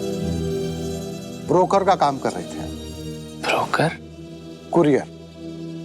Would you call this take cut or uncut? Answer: cut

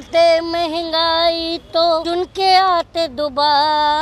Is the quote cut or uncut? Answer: cut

